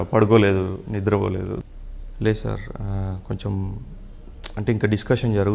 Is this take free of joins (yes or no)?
no